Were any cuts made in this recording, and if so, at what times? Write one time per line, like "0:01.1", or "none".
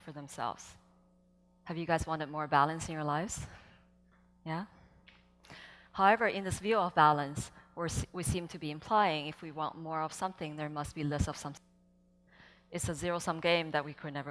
0:10.0